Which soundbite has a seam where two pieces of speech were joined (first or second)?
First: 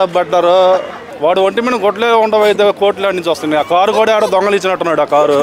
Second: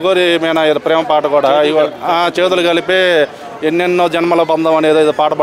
first